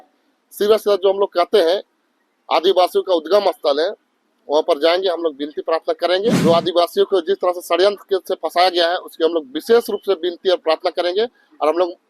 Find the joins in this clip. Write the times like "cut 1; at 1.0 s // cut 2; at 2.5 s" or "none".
cut 1; at 6.4 s